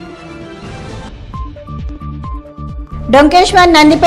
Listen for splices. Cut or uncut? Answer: cut